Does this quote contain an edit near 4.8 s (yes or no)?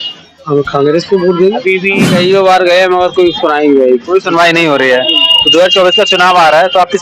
no